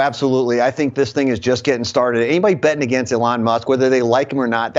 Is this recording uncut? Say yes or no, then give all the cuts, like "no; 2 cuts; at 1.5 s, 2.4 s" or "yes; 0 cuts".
yes; 0 cuts